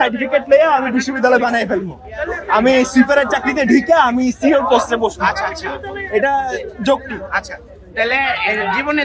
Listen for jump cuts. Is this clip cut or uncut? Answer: uncut